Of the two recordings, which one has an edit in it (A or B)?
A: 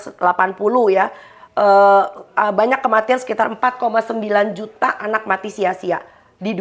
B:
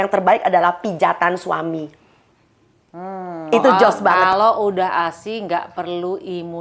B